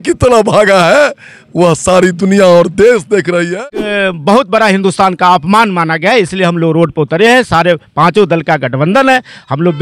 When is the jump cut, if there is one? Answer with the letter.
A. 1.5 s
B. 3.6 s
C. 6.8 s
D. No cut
B